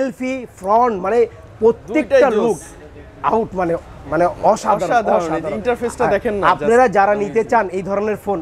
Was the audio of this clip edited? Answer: no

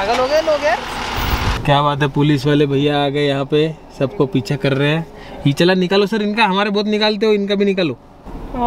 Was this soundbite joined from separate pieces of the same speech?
no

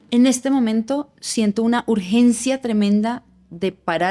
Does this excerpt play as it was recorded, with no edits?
yes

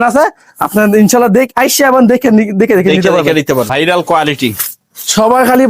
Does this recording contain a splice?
yes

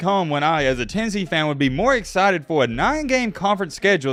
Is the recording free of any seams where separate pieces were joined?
yes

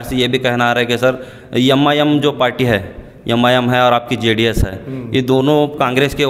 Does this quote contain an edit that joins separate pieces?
no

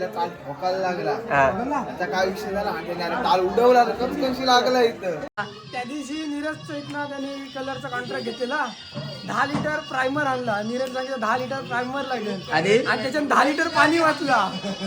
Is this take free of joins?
no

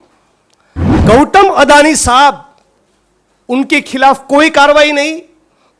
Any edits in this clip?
no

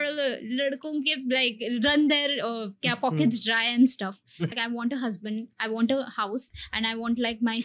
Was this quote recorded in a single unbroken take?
no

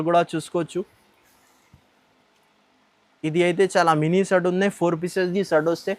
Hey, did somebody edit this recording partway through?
no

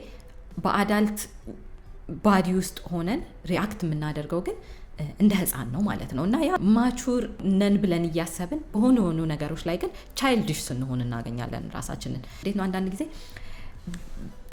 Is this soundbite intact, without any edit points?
no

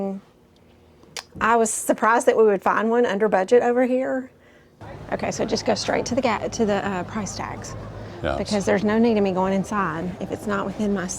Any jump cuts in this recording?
yes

